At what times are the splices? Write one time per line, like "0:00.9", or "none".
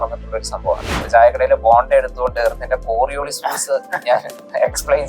0:01.0